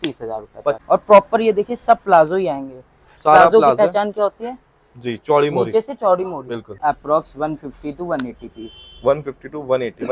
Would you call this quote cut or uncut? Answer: cut